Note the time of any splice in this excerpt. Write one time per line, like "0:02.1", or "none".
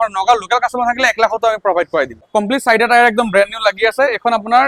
0:02.2